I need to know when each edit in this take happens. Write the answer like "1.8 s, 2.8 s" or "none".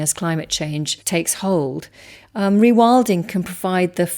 1.0 s